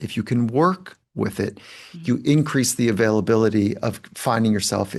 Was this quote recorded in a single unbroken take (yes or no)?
yes